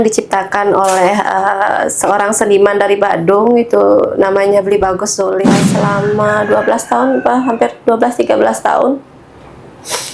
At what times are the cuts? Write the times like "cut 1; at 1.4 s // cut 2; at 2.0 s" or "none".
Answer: cut 1; at 5.4 s